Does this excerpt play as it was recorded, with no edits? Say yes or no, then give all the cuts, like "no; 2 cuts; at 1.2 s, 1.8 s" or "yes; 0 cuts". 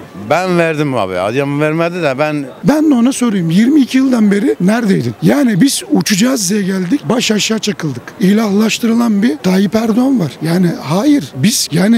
no; 2 cuts; at 2.6 s, 8.1 s